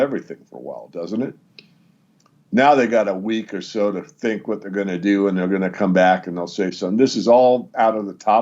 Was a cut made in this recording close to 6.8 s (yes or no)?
no